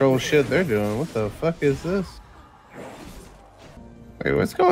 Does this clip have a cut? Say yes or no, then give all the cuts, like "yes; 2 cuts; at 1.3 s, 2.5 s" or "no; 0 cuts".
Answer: yes; 1 cut; at 3.8 s